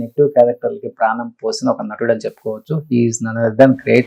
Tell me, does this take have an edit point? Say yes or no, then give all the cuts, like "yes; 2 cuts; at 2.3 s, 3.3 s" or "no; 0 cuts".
no; 0 cuts